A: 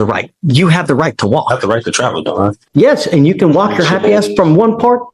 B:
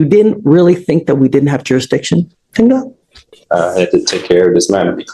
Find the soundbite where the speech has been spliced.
A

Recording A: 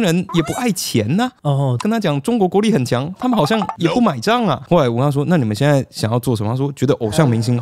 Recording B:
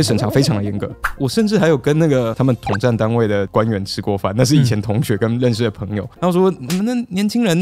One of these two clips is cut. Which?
B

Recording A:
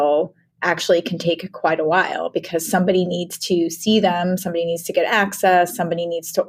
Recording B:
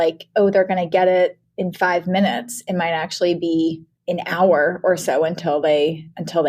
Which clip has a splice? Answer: B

